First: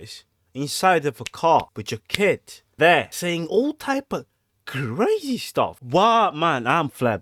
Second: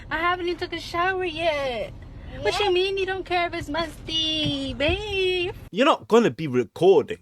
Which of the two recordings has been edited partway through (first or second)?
second